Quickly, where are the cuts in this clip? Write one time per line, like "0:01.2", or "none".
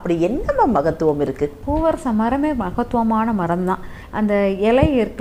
0:01.6
0:04.0